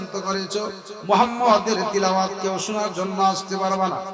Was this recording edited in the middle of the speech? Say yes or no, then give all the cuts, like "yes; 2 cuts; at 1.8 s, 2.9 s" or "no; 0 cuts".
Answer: no; 0 cuts